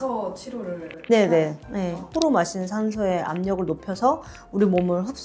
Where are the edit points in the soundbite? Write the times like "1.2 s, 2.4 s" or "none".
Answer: 2.1 s